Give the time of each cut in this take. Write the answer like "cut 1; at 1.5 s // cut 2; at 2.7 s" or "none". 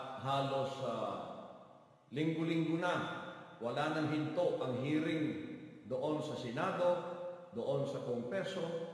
none